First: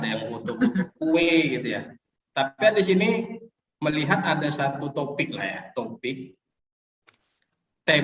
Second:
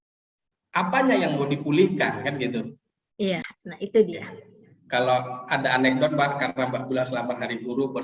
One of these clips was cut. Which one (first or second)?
second